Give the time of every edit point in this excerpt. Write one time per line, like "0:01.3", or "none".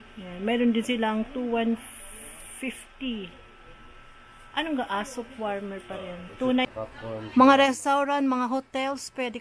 0:06.7